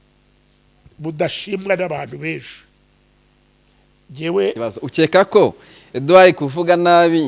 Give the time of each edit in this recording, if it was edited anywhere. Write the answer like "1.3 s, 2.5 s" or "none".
4.6 s